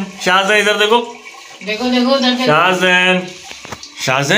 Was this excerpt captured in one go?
yes; 0 cuts

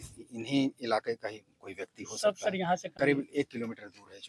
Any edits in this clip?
yes; 1 cut; at 2.6 s

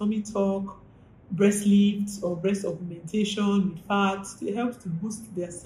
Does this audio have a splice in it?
no; 0 cuts

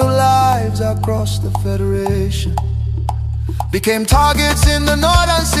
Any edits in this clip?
yes; 1 cut; at 4.7 s

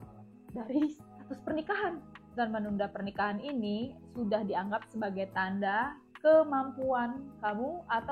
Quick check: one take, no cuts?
no; 1 cut; at 2.1 s

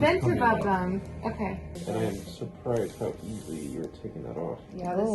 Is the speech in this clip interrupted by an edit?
no; 0 cuts

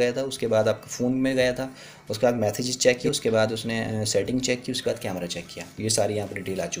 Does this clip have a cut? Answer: yes; 1 cut; at 3.0 s

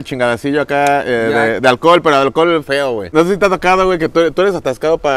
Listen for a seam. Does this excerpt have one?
yes; 1 cut; at 3.1 s

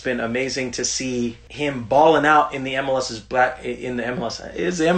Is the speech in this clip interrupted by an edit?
yes; 1 cut; at 1.4 s

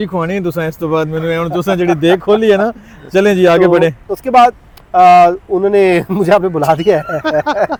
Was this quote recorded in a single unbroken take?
yes; 0 cuts

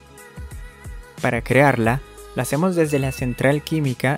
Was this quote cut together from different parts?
yes; 1 cut; at 1.2 s

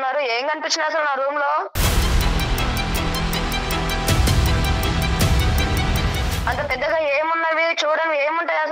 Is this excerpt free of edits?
no; 1 cut; at 1.8 s

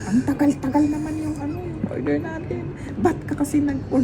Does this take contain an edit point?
yes; 1 cut; at 2.8 s

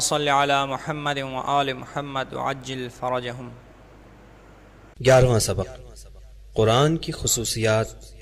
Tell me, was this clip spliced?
yes; 1 cut; at 1.3 s

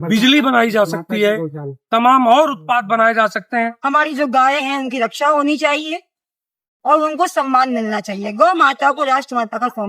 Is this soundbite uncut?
no; 1 cut; at 3.8 s

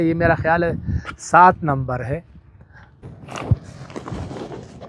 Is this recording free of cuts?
no; 1 cut; at 2.9 s

